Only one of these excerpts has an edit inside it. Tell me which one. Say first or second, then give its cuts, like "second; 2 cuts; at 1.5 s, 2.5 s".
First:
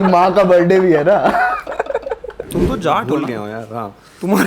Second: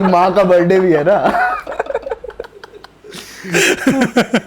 first; 1 cut; at 2.4 s